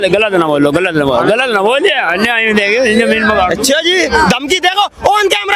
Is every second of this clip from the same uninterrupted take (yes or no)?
yes